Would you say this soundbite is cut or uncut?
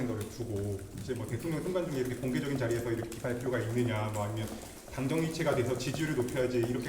uncut